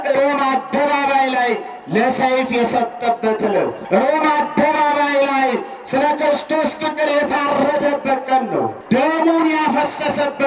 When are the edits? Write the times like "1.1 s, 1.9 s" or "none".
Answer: 3.8 s, 8.8 s